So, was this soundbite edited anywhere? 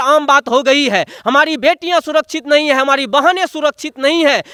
no; 0 cuts

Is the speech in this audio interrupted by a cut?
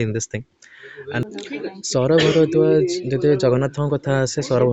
yes; 1 cut; at 1.2 s

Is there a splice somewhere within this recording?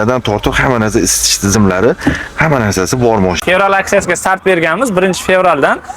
yes; 1 cut; at 3.4 s

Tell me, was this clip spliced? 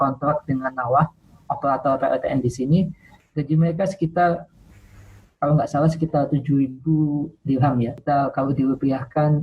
yes; 1 cut; at 8.0 s

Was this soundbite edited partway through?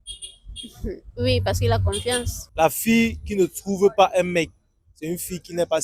yes; 1 cut; at 2.4 s

